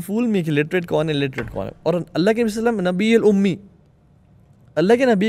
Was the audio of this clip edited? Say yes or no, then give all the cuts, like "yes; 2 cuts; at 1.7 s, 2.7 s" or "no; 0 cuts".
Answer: no; 0 cuts